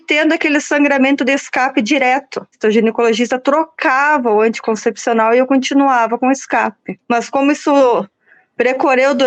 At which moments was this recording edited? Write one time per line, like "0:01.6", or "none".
0:02.6
0:06.9